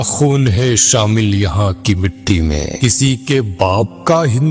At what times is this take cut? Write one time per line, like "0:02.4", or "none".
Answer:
0:02.8